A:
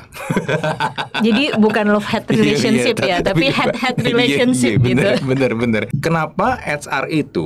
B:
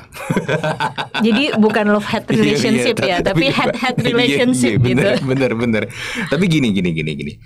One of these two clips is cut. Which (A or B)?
A